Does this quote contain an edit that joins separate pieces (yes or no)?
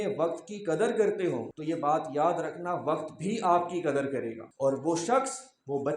yes